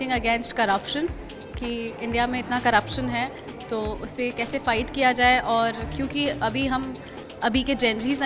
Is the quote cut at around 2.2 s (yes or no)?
no